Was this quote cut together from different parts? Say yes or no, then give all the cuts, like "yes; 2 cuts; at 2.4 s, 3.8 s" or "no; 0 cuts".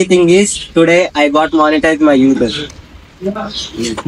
no; 0 cuts